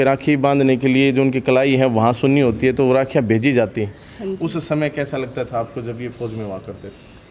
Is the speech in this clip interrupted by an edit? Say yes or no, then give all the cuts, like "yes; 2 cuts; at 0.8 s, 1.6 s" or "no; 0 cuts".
no; 0 cuts